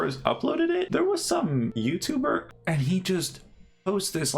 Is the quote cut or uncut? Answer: cut